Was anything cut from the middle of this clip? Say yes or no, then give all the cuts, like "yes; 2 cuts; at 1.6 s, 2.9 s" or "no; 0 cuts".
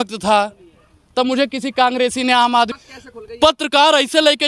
yes; 1 cut; at 2.8 s